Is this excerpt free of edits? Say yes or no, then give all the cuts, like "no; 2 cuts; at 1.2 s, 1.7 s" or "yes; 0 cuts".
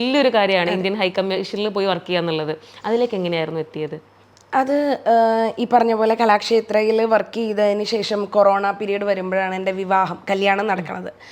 yes; 0 cuts